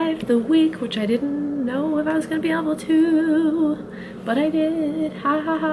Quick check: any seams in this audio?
no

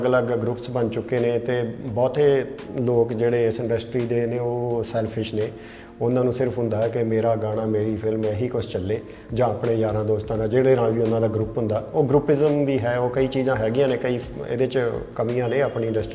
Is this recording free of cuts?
yes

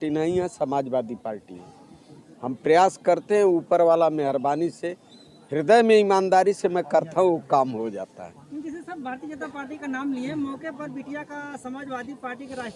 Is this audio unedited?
yes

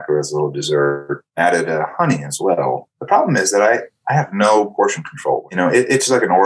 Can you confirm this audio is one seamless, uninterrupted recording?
no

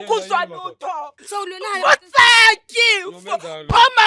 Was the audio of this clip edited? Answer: yes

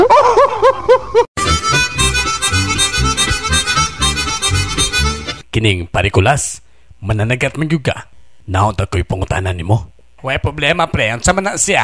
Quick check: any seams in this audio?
no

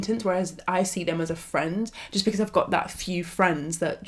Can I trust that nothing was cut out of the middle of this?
yes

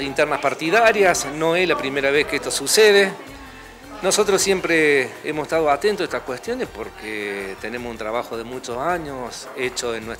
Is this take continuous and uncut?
yes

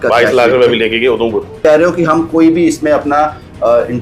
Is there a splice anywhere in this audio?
yes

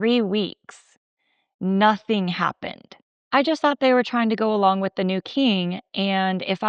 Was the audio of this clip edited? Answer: yes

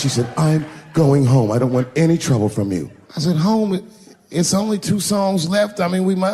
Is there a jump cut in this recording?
yes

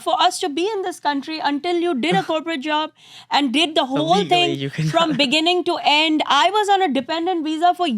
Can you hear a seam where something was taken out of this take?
no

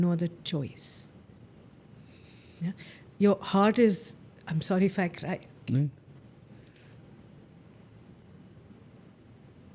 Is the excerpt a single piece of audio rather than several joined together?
yes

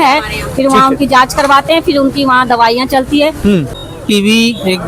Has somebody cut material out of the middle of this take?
yes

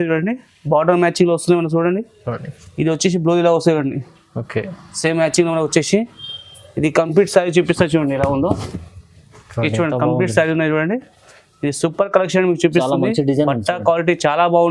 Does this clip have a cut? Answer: no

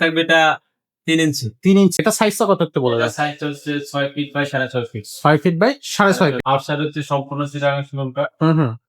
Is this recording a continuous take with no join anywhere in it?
no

